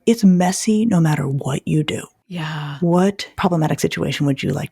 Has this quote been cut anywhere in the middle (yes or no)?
yes